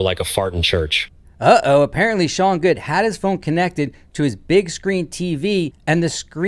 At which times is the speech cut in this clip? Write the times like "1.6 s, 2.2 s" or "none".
none

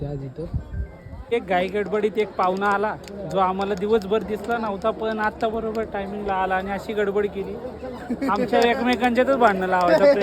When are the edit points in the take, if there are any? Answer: 1.1 s

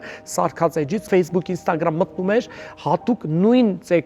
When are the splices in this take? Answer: 1.0 s

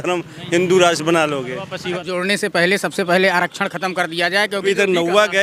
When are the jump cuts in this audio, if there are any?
2.0 s, 4.6 s

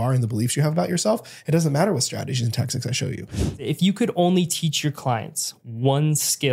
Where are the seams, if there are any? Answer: 3.6 s

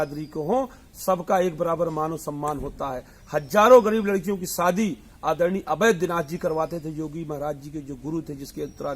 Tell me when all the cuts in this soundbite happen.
none

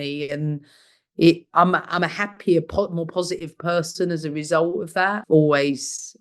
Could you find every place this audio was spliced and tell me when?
5.2 s

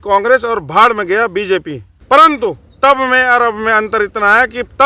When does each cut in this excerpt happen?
1.9 s

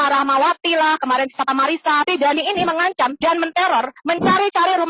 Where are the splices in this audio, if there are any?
2.1 s, 3.2 s

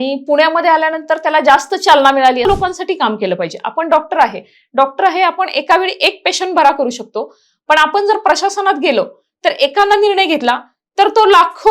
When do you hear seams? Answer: 2.4 s

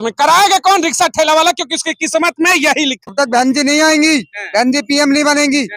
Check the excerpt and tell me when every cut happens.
3.0 s

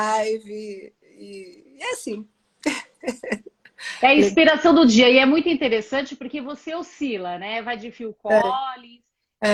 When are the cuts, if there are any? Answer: none

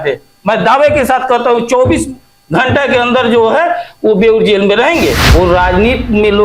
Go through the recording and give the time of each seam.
5.2 s

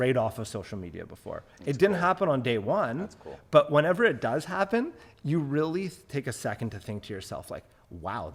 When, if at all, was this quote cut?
none

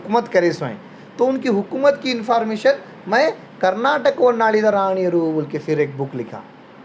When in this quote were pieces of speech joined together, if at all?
none

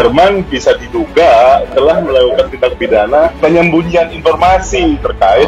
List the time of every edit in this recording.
3.4 s

